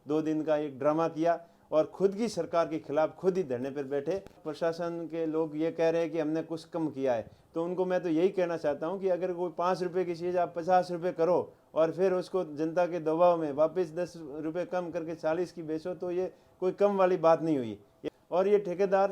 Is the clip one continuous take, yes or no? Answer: no